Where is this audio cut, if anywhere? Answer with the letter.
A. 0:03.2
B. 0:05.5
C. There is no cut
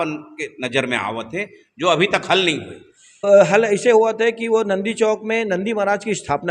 A